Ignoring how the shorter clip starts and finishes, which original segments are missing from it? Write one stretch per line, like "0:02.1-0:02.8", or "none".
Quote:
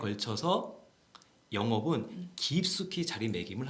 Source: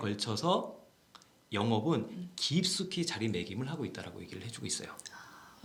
none